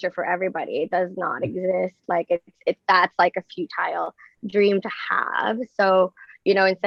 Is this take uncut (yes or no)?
yes